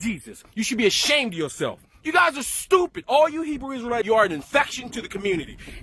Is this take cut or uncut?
cut